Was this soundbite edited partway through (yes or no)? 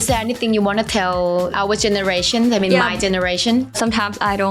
yes